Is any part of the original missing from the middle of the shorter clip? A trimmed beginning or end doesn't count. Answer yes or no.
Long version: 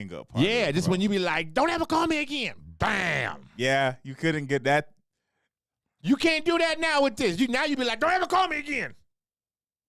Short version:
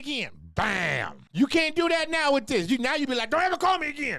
yes